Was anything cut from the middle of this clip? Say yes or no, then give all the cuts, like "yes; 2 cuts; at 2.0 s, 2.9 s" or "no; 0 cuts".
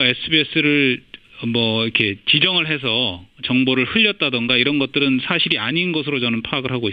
no; 0 cuts